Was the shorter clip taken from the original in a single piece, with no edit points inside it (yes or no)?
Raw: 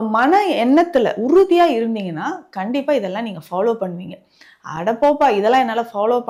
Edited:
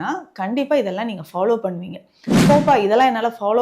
no